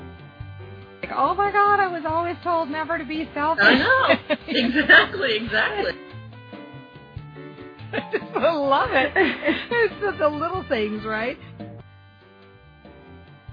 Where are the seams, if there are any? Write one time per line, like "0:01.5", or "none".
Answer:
0:12.2